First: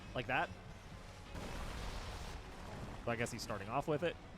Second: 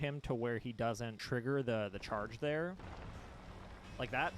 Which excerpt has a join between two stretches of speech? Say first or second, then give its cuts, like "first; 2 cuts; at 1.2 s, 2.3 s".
second; 2 cuts; at 1.1 s, 2.8 s